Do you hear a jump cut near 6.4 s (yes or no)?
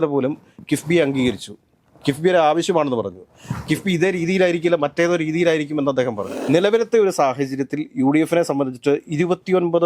yes